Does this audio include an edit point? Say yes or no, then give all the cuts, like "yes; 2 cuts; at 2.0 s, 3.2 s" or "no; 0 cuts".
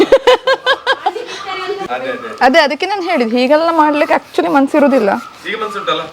yes; 1 cut; at 1.9 s